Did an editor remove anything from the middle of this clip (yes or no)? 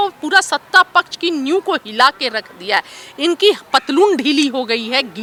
no